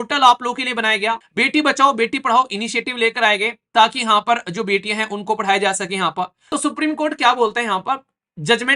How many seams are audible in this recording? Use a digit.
2